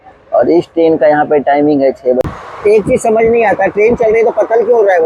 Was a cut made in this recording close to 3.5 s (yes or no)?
no